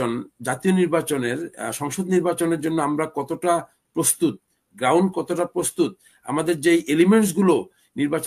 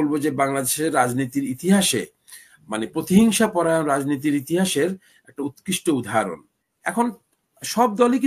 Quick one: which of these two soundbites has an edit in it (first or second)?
second